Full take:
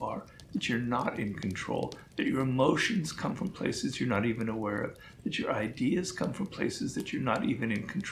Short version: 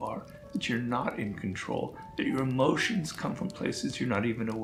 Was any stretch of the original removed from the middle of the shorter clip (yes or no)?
no